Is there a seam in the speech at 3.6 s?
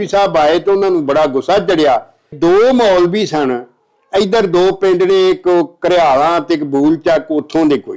no; 1 cut; at 2.3 s

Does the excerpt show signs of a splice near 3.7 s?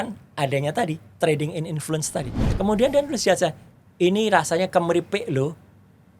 no; 1 cut; at 2.5 s

